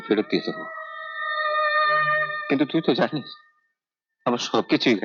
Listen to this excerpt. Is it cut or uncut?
uncut